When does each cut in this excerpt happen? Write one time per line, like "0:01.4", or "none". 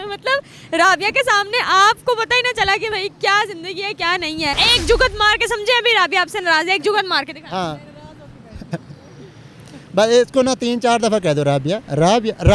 0:04.6